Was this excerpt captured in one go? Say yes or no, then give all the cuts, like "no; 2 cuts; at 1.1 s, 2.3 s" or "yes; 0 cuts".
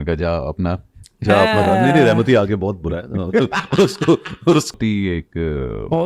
no; 1 cut; at 4.7 s